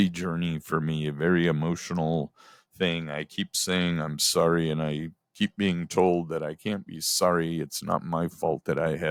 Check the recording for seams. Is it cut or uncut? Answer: uncut